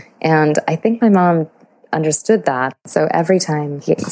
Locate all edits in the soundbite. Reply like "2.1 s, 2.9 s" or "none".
2.7 s